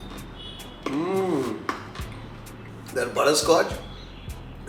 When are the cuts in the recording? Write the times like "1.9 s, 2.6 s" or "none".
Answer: none

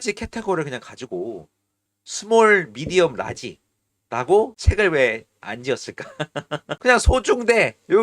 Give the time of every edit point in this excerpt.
4.6 s, 6.7 s

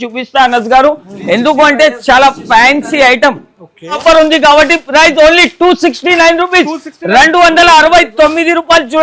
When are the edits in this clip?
4.0 s

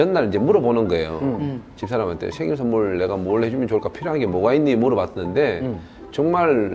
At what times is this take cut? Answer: none

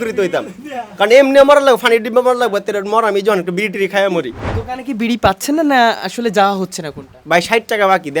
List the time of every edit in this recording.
4.5 s

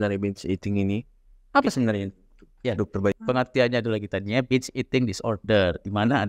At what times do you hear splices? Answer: 3.2 s

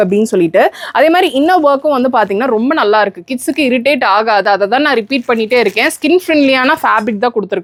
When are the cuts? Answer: none

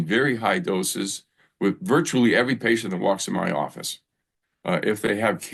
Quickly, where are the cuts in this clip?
none

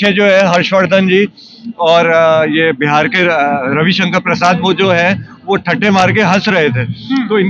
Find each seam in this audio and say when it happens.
none

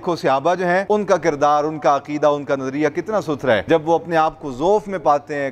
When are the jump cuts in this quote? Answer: 0.8 s, 3.6 s

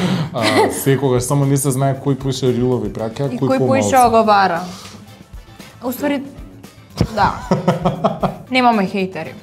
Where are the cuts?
8.4 s

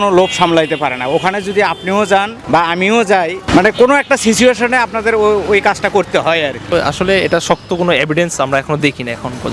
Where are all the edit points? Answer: 2.4 s, 3.5 s, 6.6 s

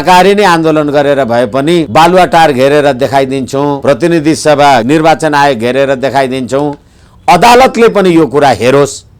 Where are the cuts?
1.9 s, 3.8 s, 4.8 s

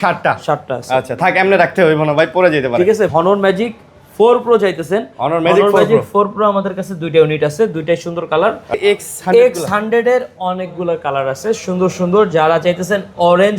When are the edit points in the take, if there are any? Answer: 3.1 s, 8.7 s

